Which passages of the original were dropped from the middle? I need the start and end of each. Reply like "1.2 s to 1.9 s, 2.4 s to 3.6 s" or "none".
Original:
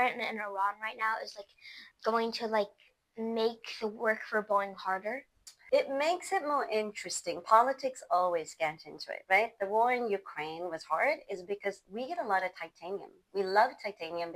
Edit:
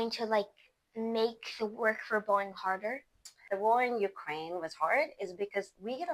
5.6 s to 9.5 s